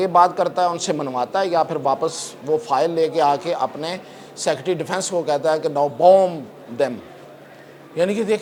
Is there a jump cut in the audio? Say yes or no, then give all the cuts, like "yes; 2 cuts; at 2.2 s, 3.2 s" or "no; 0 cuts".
no; 0 cuts